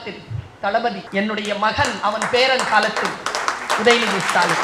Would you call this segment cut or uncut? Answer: cut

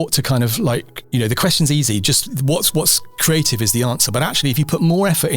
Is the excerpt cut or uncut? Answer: cut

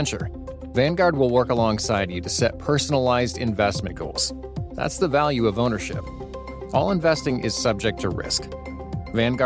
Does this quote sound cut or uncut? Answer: uncut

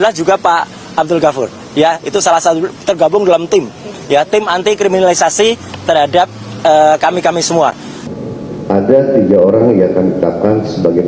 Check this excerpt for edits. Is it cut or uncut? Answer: cut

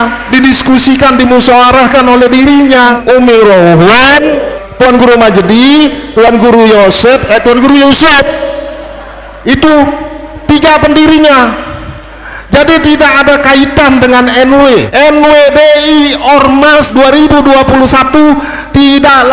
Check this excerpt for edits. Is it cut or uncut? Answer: cut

